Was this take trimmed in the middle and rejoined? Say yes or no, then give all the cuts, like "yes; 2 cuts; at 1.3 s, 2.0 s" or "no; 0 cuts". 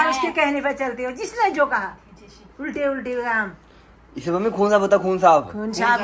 no; 0 cuts